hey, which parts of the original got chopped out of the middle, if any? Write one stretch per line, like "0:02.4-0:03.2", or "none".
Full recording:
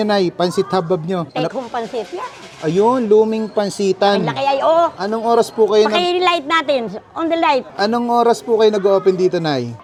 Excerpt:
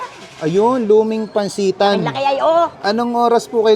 0:05.0-0:07.7